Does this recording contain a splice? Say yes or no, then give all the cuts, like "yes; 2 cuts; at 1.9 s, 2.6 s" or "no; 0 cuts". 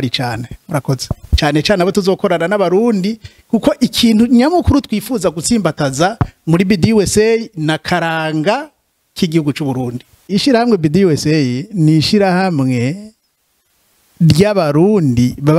yes; 2 cuts; at 1.2 s, 10.2 s